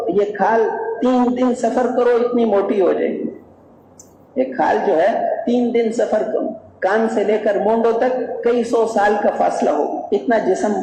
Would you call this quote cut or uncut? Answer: uncut